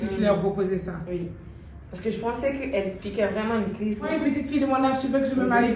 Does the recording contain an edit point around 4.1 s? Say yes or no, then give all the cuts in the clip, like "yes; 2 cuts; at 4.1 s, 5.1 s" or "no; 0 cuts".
yes; 1 cut; at 4.1 s